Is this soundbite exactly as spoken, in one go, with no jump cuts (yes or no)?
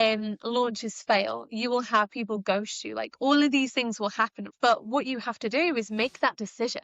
no